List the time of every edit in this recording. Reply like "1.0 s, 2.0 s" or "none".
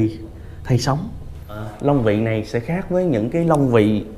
1.6 s